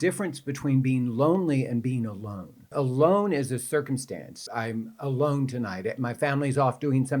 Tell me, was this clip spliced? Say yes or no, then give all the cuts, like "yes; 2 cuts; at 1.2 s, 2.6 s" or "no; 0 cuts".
yes; 2 cuts; at 2.7 s, 4.4 s